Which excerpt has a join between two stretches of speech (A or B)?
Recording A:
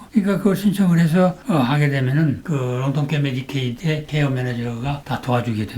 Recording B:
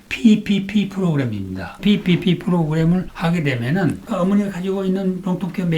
B